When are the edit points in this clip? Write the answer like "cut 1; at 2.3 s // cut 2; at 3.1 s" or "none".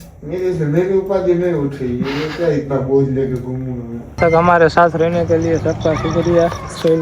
cut 1; at 4.2 s